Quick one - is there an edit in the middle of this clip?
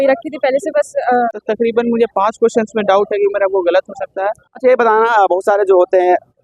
yes; 2 cuts; at 1.4 s, 4.5 s

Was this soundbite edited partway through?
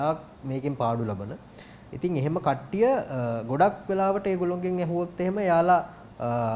no; 0 cuts

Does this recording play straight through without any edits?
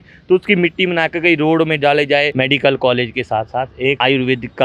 no; 1 cut; at 2.3 s

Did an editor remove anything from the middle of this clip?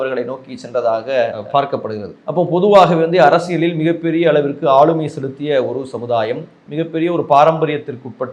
no; 0 cuts

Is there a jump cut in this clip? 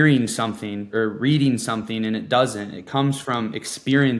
yes; 1 cut; at 0.9 s

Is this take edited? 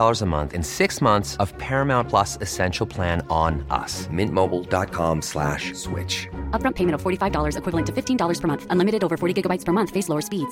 no; 0 cuts

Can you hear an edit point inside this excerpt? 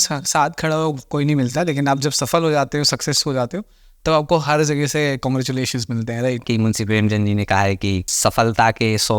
yes; 2 cuts; at 6.4 s, 8.1 s

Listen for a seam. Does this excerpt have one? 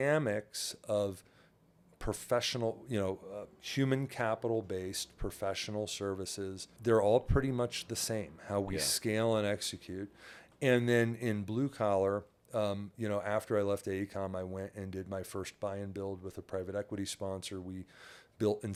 no; 0 cuts

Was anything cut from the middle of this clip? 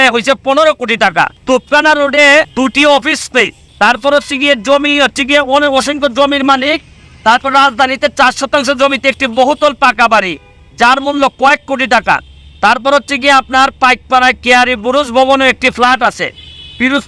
yes; 3 cuts; at 1.4 s, 2.5 s, 3.6 s

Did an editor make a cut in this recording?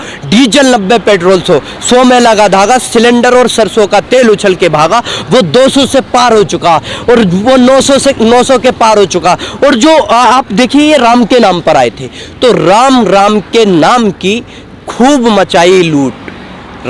no; 0 cuts

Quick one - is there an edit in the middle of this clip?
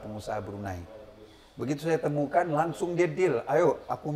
no; 0 cuts

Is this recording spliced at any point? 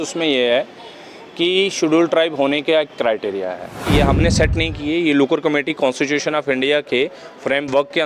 yes; 1 cut; at 3.8 s

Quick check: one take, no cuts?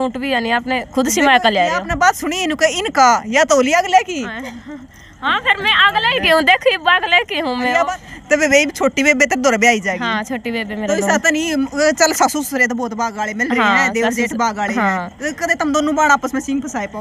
no; 1 cut; at 7.9 s

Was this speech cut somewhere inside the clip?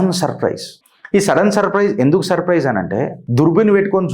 yes; 1 cut; at 3.2 s

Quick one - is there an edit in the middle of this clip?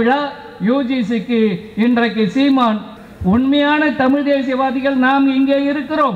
yes; 1 cut; at 3.0 s

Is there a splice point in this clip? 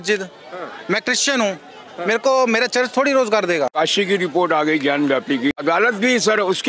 yes; 2 cuts; at 3.7 s, 5.6 s

